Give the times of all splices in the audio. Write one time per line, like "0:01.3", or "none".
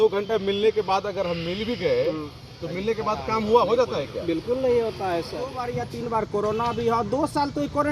0:05.7